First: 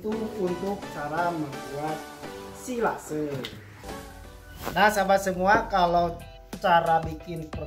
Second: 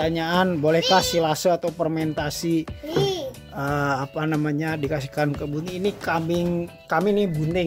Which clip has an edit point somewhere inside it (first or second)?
first